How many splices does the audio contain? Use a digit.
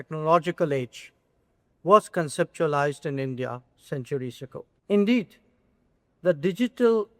1